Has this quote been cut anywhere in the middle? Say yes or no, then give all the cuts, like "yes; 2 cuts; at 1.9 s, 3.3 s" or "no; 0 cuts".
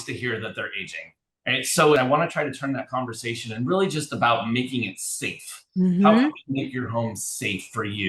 yes; 1 cut; at 2.0 s